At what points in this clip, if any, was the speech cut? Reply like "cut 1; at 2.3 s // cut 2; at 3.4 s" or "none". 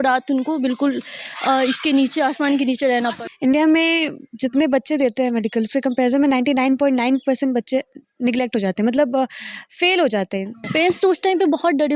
cut 1; at 3.2 s // cut 2; at 10.6 s